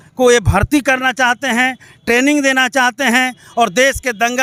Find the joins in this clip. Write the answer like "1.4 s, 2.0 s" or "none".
none